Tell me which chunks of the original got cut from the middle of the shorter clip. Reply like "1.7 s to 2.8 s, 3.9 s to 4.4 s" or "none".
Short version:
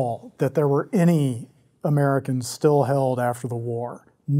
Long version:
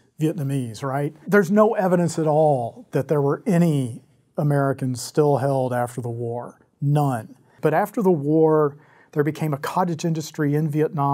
none